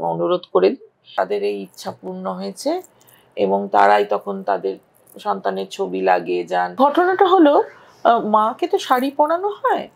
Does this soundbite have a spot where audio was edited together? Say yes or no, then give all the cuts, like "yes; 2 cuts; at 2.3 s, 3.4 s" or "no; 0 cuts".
yes; 2 cuts; at 1.0 s, 6.7 s